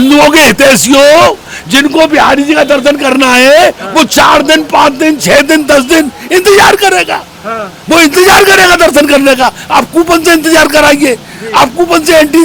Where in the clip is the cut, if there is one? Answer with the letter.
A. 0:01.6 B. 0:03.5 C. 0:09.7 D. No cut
D